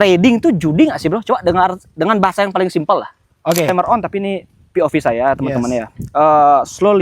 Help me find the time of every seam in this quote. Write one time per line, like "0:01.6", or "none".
0:03.7